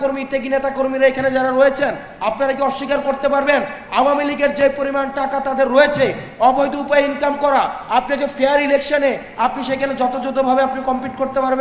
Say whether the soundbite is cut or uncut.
uncut